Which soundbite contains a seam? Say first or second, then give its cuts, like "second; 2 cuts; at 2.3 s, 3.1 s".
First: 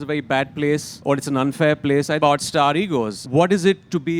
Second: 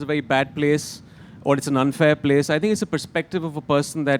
first; 3 cuts; at 0.9 s, 2.2 s, 3.2 s